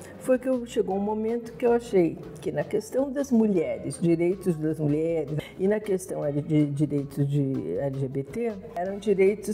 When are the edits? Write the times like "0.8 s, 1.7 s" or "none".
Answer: 5.3 s, 8.7 s